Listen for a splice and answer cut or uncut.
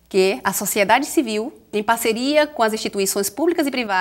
cut